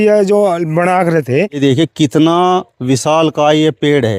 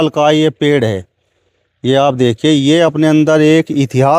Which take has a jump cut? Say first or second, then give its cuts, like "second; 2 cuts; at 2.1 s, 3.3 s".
first; 1 cut; at 1.6 s